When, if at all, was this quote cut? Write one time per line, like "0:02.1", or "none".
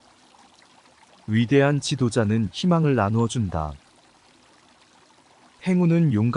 0:00.9
0:03.8
0:05.3